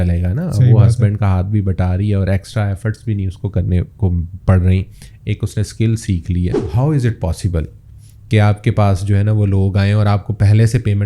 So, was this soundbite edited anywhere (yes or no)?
yes